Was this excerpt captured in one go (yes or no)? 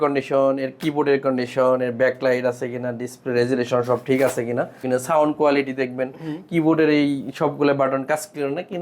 no